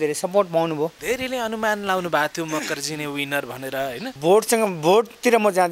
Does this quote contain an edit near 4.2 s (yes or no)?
yes